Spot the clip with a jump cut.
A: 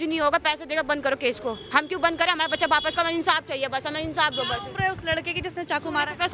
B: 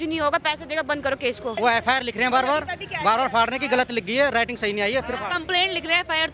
B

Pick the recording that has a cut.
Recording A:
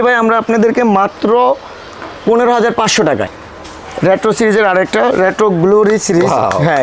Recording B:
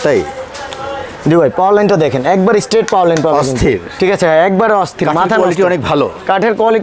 A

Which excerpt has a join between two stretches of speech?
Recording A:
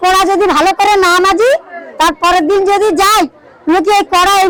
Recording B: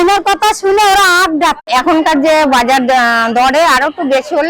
B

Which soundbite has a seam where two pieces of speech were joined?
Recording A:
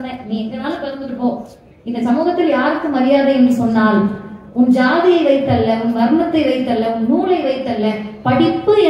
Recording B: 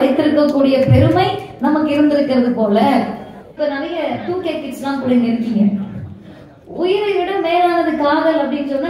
B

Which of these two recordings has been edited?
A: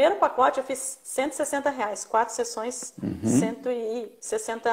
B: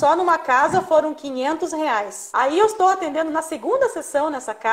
B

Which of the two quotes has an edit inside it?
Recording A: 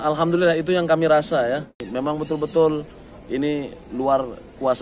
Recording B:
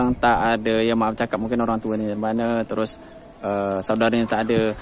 A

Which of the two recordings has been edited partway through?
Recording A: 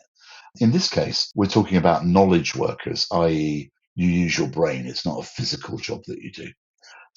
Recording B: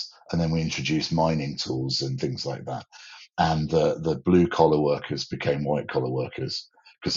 A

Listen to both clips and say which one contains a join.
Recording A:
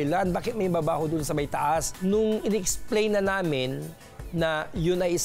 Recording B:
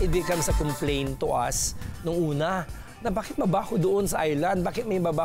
A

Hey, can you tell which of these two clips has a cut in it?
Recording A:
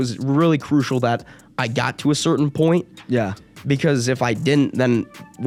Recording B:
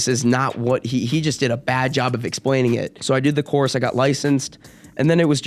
B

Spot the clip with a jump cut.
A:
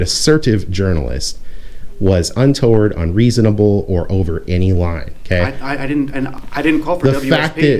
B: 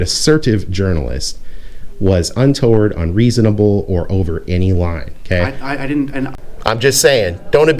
B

